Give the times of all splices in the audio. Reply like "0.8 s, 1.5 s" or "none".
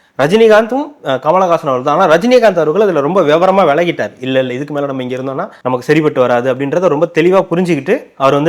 none